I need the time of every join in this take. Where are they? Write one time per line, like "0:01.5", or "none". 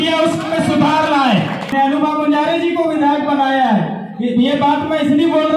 0:01.7